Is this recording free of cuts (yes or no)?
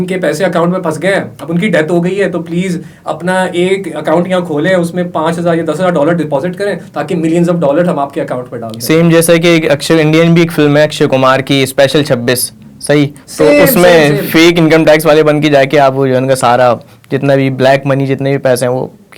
yes